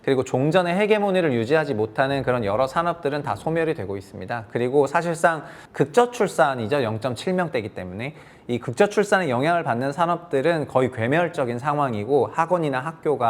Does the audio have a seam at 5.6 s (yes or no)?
yes